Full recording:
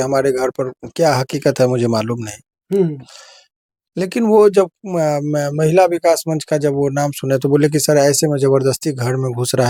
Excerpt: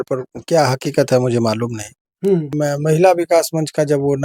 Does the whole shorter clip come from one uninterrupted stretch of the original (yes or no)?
no